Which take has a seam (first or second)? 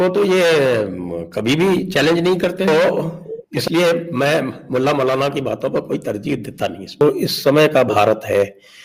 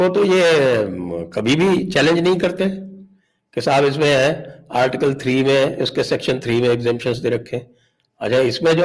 first